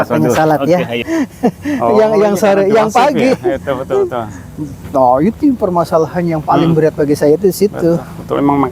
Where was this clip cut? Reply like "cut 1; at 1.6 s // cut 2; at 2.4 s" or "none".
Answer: cut 1; at 1.0 s